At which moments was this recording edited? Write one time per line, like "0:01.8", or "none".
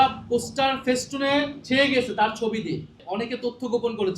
0:03.0